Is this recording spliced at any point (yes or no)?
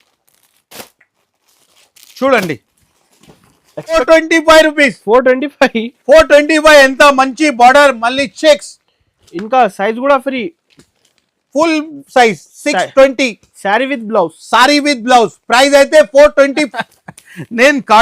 yes